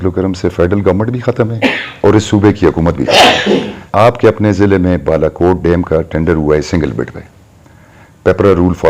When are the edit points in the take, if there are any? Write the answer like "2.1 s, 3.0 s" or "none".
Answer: 3.8 s